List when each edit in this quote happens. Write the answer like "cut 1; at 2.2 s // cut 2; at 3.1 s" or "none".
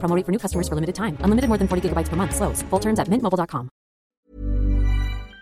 cut 1; at 4.1 s